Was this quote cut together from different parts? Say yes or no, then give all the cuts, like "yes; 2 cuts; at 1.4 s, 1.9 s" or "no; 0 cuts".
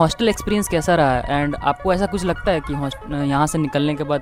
no; 0 cuts